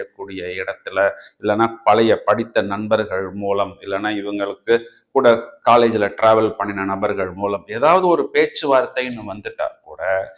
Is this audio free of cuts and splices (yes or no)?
yes